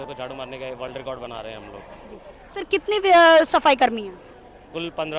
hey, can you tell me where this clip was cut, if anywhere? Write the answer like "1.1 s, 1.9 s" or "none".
none